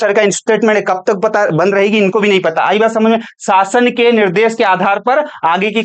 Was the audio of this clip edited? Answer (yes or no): no